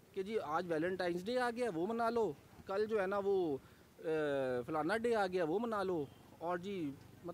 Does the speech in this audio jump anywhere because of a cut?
no; 0 cuts

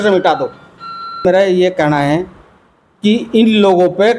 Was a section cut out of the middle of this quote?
yes; 1 cut; at 1.2 s

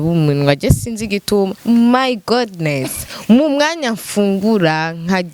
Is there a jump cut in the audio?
yes; 1 cut; at 1.6 s

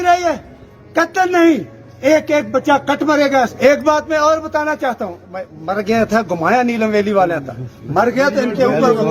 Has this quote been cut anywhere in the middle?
yes; 1 cut; at 3.5 s

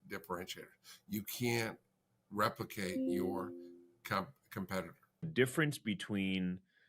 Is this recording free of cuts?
no; 1 cut; at 5.3 s

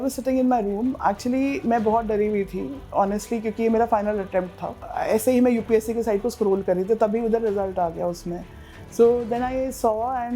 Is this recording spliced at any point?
yes; 1 cut; at 4.9 s

